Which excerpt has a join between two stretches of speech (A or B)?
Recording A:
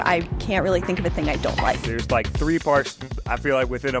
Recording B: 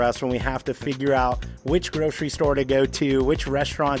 A